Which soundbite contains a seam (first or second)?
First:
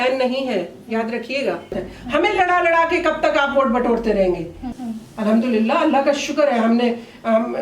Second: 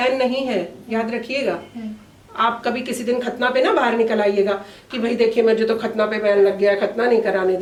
first